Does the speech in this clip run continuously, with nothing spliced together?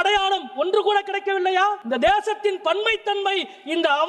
no; 1 cut; at 1.8 s

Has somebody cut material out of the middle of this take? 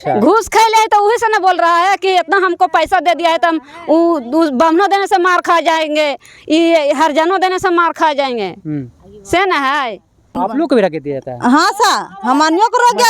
yes; 1 cut; at 10.4 s

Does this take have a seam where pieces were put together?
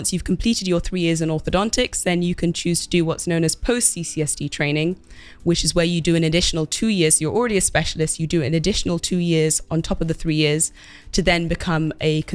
no; 0 cuts

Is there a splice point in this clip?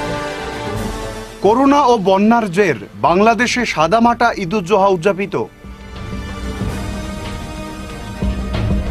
yes; 1 cut; at 0.9 s

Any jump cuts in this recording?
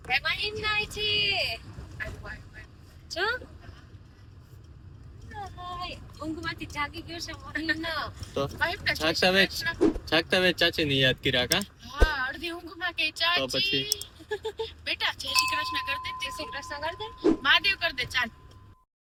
no; 0 cuts

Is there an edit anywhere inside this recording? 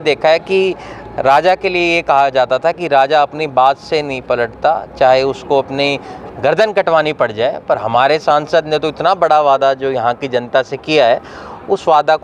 no; 0 cuts

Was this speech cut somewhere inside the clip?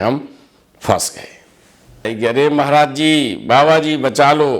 yes; 1 cut; at 2.1 s

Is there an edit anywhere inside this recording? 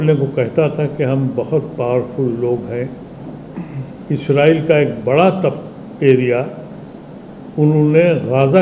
no; 0 cuts

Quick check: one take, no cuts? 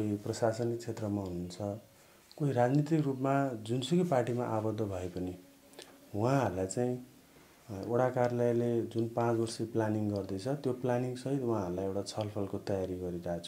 yes; 0 cuts

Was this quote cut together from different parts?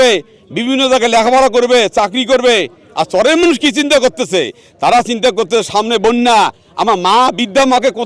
no; 0 cuts

